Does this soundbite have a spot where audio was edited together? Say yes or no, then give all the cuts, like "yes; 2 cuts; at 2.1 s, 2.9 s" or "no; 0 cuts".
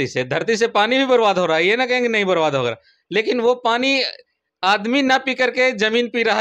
no; 0 cuts